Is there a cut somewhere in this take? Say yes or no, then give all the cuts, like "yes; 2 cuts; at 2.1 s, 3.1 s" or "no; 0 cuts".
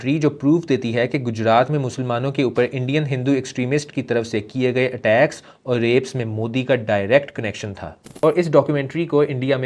no; 0 cuts